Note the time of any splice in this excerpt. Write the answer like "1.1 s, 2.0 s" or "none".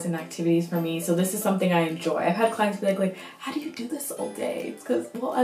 none